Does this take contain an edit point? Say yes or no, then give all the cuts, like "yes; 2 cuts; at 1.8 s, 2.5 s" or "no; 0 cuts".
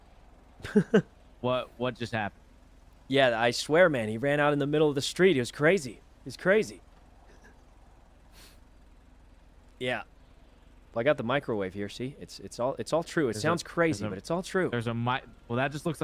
no; 0 cuts